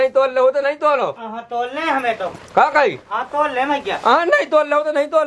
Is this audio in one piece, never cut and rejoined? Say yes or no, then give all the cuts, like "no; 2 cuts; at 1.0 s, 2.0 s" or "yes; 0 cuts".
yes; 0 cuts